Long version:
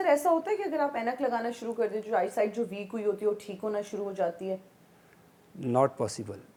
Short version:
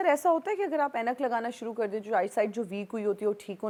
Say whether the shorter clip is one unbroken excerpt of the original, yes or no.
yes